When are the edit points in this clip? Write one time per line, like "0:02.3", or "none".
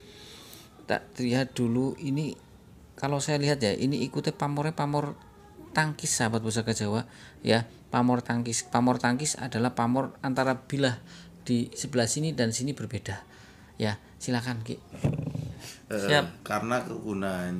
0:15.7